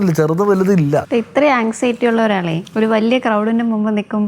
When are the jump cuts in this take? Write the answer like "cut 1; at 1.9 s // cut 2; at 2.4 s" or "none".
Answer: cut 1; at 1.1 s // cut 2; at 2.6 s